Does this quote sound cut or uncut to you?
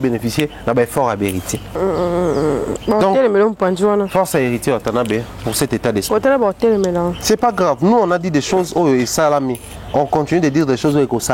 cut